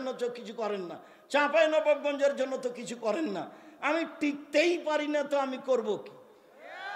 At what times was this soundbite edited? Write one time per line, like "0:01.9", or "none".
none